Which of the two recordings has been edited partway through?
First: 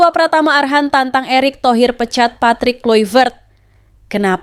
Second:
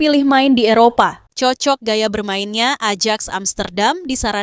second; 1 cut; at 1.2 s

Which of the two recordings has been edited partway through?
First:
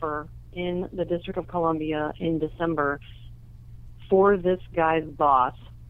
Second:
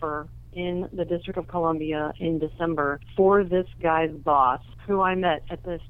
second; 2 cuts; at 3.0 s, 4.7 s

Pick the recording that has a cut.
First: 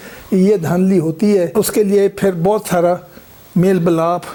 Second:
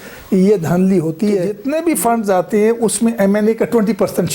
second; 1 cut; at 1.5 s

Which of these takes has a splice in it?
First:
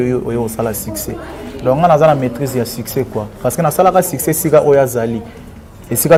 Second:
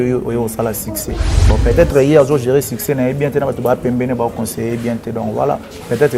second; 1 cut; at 1.3 s

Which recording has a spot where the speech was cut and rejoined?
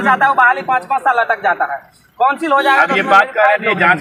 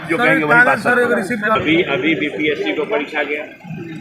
second; 1 cut; at 1.6 s

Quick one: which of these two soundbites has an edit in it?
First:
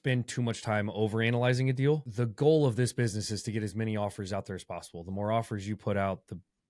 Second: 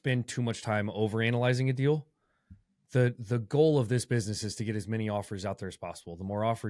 first; 1 cut; at 2.1 s

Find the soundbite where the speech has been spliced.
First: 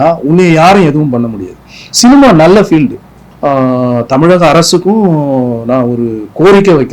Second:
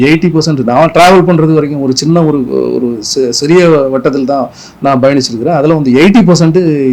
first; 1 cut; at 3.2 s

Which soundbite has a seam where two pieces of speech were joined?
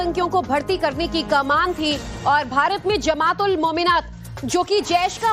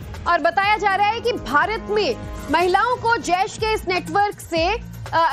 second; 1 cut; at 4.1 s

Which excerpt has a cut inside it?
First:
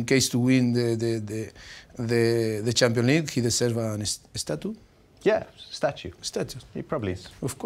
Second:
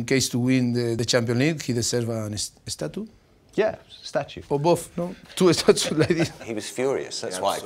second; 3 cuts; at 1.0 s, 4.4 s, 6.4 s

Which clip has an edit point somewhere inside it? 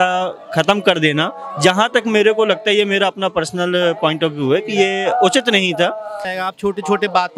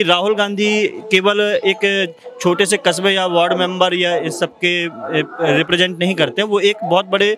first; 1 cut; at 6.3 s

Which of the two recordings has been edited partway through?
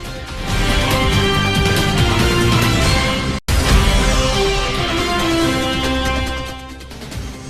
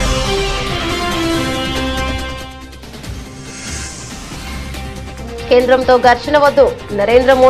second; 2 cuts; at 4.0 s, 5.5 s

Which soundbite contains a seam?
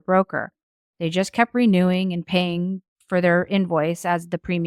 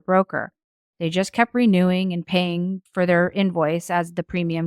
second; 1 cut; at 2.8 s

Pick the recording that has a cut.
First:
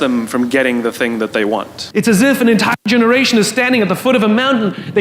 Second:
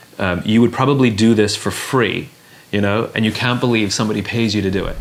first; 1 cut; at 1.8 s

